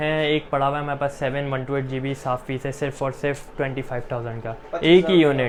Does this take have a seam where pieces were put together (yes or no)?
no